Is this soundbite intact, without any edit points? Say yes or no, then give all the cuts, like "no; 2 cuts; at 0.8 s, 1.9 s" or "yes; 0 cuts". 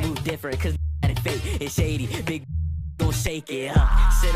yes; 0 cuts